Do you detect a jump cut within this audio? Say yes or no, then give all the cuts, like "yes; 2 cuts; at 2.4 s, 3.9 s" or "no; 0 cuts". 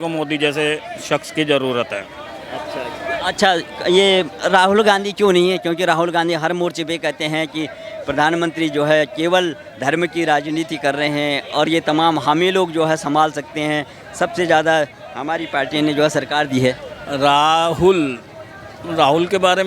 no; 0 cuts